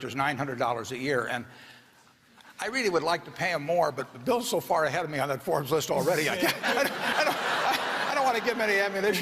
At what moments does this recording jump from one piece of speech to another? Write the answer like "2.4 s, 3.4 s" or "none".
none